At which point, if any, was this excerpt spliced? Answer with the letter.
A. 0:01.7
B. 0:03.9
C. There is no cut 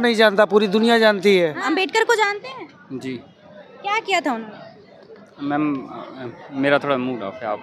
A